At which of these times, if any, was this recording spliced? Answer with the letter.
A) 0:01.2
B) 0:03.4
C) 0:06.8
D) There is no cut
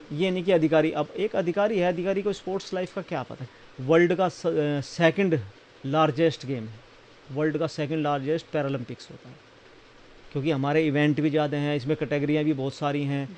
B